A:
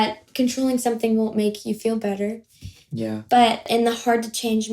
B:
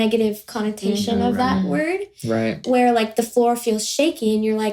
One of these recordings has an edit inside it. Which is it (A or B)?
A